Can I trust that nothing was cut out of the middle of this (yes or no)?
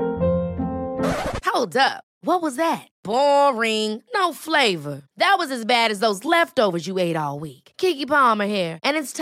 yes